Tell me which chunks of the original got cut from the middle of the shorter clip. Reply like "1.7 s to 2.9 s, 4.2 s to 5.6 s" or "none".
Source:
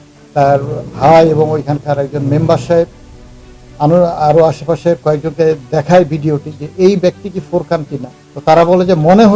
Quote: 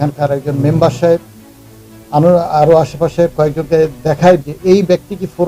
6.1 s to 6.6 s